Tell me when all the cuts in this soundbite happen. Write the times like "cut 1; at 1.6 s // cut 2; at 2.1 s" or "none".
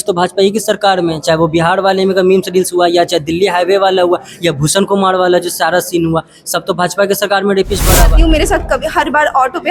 cut 1; at 8.1 s